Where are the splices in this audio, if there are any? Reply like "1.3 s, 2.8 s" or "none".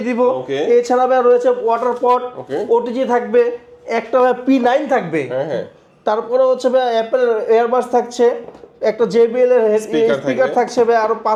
none